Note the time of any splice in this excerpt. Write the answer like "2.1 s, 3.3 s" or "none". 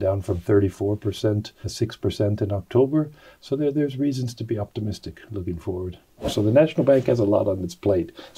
1.6 s, 6.2 s